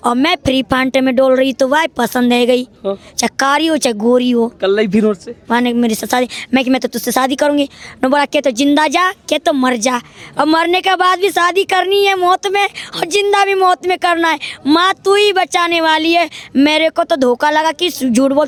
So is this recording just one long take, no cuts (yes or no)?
yes